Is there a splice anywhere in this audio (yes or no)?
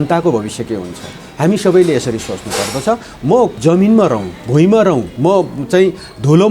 yes